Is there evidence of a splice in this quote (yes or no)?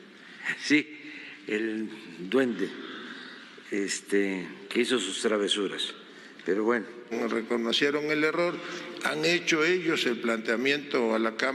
yes